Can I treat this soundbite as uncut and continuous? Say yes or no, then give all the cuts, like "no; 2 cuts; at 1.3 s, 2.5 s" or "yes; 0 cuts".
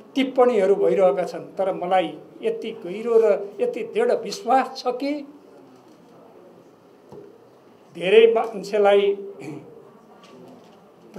yes; 0 cuts